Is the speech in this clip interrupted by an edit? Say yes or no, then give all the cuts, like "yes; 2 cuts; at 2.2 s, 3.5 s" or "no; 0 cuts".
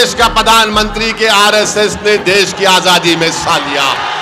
no; 0 cuts